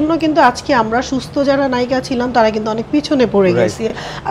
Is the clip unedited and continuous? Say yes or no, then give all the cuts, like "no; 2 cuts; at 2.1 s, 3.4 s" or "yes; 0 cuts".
yes; 0 cuts